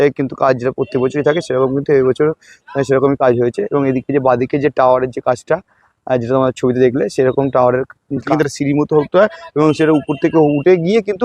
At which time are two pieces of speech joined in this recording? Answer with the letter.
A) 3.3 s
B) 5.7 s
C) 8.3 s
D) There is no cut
C